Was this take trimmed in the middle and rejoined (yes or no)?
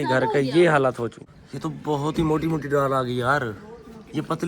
yes